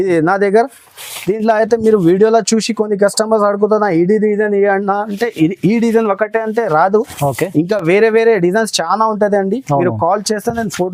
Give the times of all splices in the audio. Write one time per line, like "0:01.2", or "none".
none